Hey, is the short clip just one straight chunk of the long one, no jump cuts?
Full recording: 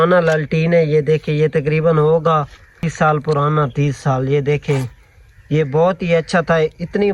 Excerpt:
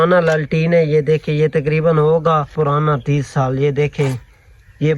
no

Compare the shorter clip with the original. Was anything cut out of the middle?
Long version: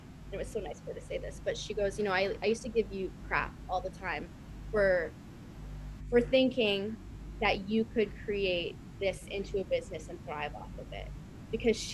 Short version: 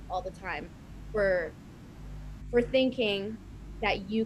no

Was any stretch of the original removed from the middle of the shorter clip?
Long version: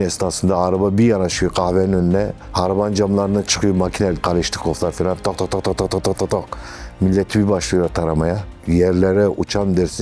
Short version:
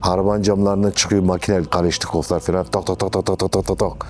no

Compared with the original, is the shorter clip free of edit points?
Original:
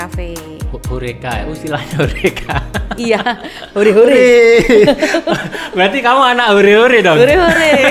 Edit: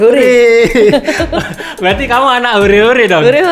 yes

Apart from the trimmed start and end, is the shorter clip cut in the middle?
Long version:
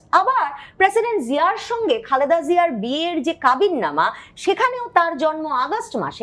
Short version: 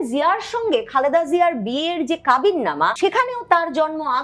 yes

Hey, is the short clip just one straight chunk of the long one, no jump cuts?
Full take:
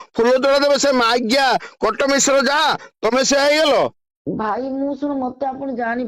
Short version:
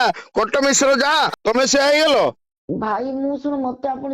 no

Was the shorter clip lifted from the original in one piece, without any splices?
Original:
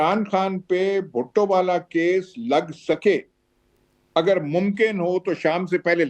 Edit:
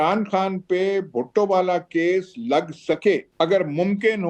no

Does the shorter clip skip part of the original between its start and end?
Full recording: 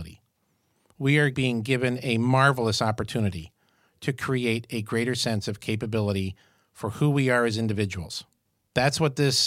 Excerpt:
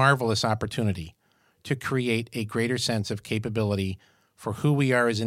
no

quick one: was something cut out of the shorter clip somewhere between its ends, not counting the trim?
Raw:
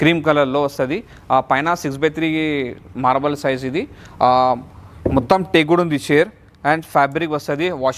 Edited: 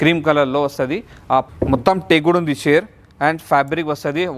yes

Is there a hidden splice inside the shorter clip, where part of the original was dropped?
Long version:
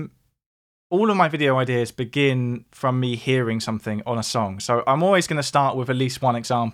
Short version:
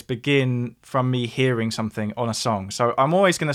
no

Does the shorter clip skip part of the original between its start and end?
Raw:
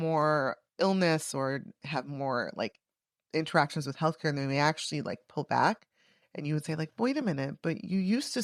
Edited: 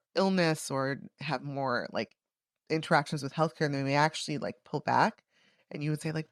no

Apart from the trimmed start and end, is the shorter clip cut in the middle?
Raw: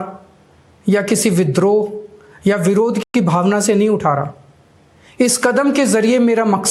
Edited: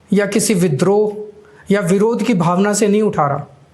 yes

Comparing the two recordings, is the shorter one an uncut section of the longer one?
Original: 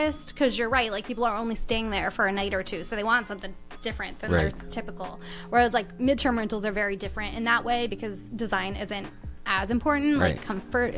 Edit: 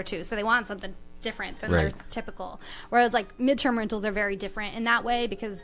yes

